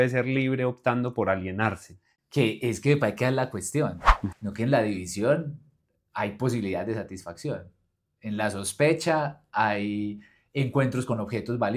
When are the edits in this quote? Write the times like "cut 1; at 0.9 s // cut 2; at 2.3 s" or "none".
cut 1; at 4.3 s